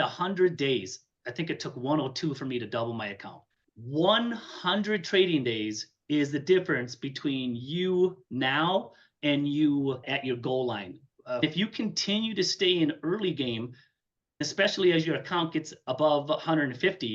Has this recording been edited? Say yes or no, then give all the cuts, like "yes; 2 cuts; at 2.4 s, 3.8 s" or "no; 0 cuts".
yes; 1 cut; at 11.4 s